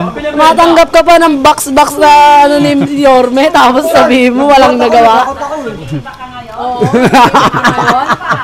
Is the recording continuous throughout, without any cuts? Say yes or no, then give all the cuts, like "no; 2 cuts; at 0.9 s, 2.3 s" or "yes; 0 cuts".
yes; 0 cuts